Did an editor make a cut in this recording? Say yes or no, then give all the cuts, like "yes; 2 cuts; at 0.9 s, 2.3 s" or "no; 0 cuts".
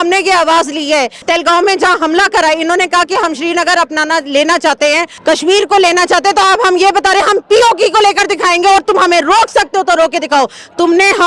yes; 2 cuts; at 1.2 s, 5.1 s